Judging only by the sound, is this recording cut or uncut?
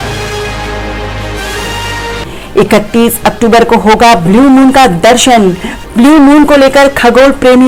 uncut